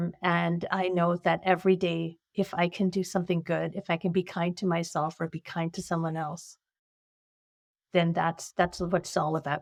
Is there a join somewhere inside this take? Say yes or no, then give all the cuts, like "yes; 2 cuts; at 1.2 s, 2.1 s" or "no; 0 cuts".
no; 0 cuts